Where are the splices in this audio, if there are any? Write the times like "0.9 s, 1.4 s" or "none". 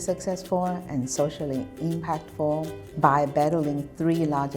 2.8 s